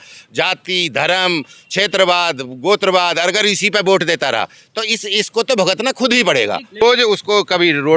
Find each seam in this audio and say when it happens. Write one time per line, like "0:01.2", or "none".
0:06.8